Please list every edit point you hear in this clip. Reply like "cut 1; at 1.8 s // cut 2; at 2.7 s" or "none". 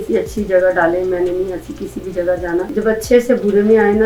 cut 1; at 2.7 s

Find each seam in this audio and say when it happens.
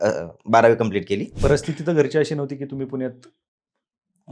cut 1; at 1.3 s

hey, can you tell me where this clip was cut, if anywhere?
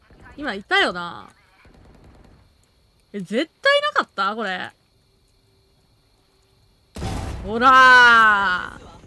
none

